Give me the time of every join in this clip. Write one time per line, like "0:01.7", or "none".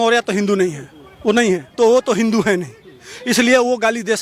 0:01.7